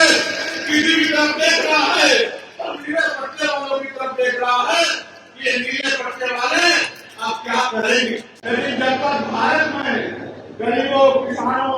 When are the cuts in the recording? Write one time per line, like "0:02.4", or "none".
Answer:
0:08.3